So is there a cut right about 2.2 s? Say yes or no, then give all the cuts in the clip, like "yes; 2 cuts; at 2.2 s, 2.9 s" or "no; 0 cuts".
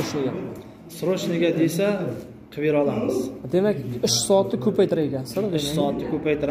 no; 0 cuts